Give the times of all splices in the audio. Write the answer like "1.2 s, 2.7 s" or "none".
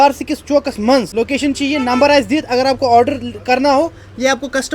1.1 s

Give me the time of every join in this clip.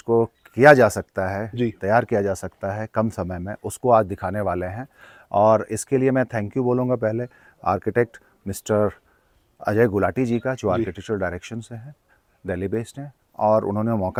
none

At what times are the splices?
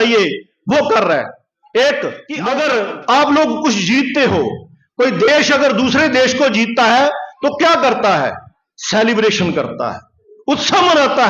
2.3 s

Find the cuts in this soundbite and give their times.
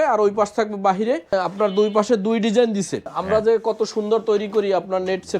1.3 s, 3.1 s

